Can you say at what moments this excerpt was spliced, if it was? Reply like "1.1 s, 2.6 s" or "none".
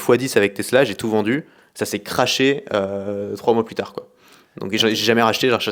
none

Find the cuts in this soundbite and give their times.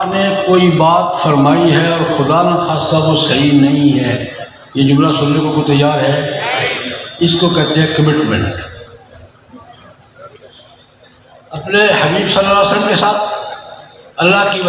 none

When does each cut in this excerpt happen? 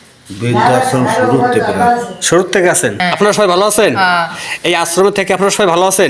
3.0 s

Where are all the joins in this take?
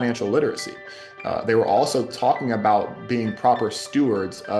none

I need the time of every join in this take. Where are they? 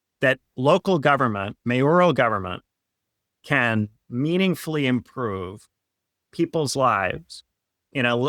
none

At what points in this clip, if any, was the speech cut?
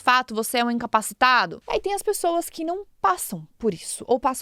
1.6 s

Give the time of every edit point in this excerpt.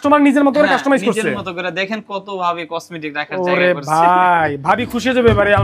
none

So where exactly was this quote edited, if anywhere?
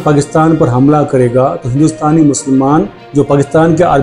3.0 s

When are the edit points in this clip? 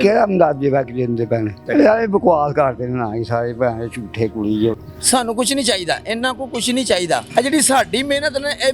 1.6 s, 4.9 s

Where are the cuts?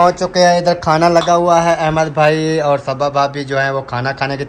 none

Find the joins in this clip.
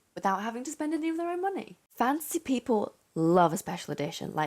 1.8 s

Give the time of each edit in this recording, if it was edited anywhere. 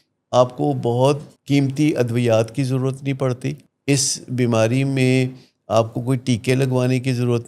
1.3 s, 3.7 s

